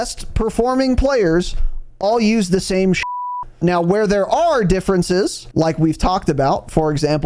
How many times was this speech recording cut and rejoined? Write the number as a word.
two